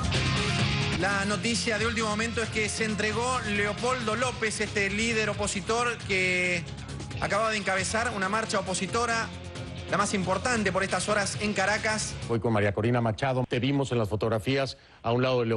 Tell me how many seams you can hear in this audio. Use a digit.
1